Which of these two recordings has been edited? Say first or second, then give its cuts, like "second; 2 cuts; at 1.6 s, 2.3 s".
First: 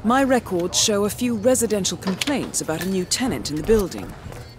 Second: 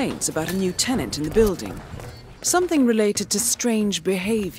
first; 1 cut; at 1.3 s